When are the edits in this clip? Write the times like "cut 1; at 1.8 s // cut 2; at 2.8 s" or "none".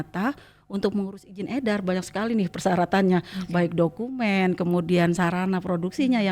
none